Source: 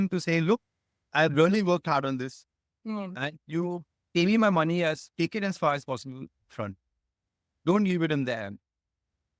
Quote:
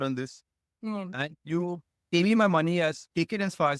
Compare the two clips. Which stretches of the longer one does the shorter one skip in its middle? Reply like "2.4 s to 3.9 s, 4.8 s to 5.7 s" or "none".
none